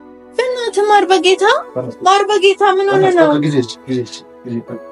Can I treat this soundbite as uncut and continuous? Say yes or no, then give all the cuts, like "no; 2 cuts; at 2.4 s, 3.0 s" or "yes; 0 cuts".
yes; 0 cuts